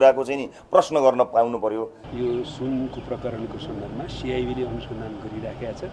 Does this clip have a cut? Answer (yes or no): yes